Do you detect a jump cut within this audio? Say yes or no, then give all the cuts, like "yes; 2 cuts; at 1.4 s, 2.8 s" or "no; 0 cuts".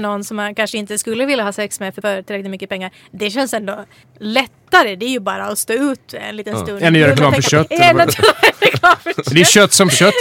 yes; 2 cuts; at 2.0 s, 4.0 s